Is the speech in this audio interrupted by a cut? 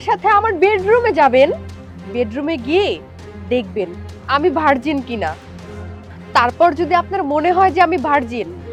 no; 0 cuts

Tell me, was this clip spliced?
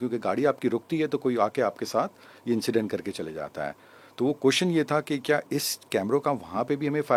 no; 0 cuts

